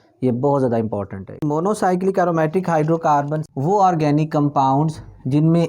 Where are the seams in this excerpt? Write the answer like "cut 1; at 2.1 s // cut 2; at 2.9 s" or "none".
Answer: cut 1; at 1.4 s // cut 2; at 3.4 s